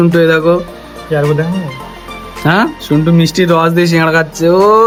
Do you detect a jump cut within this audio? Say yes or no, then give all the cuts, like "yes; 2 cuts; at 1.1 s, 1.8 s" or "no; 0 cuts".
no; 0 cuts